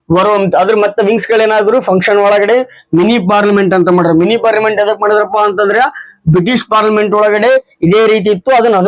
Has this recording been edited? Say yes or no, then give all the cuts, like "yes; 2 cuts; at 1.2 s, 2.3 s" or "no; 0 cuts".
no; 0 cuts